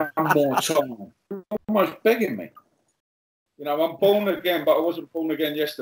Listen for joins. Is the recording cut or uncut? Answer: cut